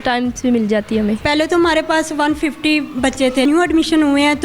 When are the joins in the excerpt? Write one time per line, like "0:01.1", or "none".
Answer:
0:01.2
0:03.5